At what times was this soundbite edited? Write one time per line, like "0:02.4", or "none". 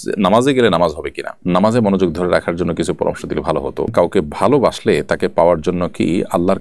0:01.4
0:03.9